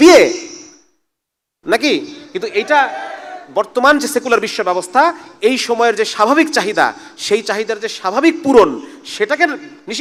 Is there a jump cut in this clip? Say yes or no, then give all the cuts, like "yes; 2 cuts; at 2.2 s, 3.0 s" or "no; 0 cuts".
no; 0 cuts